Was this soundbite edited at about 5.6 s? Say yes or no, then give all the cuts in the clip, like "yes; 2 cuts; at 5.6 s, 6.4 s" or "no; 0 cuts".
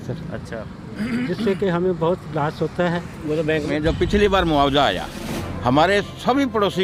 no; 1 cut; at 3.7 s